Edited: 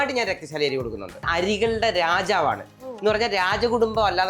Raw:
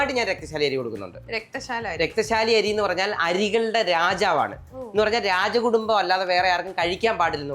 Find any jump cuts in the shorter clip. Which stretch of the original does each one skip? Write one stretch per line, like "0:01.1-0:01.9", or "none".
0:01.2-0:03.2